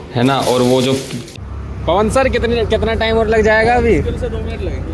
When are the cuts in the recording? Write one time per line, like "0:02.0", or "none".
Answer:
0:01.3